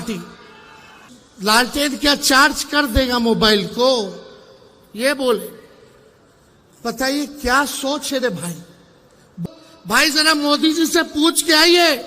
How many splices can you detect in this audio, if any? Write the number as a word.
two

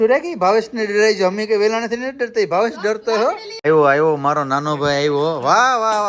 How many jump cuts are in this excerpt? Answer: one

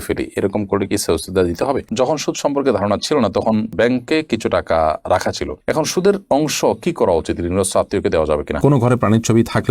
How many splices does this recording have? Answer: two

